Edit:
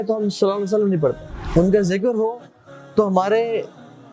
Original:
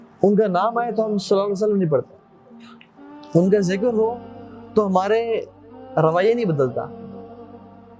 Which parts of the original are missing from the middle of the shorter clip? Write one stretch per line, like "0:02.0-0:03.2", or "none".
0:02.2-0:03.1